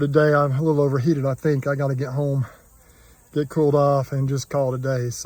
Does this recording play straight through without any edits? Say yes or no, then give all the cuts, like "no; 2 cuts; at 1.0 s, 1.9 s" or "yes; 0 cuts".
yes; 0 cuts